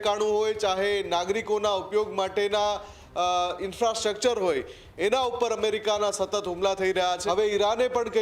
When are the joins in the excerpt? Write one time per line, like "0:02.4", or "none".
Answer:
0:07.2